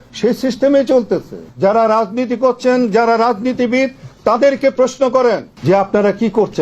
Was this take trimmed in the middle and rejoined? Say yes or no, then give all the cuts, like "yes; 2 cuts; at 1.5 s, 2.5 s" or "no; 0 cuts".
yes; 2 cuts; at 1.5 s, 5.5 s